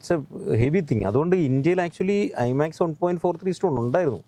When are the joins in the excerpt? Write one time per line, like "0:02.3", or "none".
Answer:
none